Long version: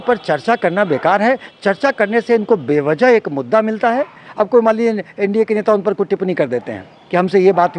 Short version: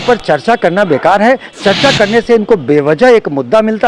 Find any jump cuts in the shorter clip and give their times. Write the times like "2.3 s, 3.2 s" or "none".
none